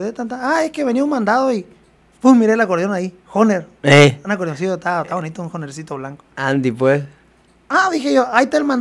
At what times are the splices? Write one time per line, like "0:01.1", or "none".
none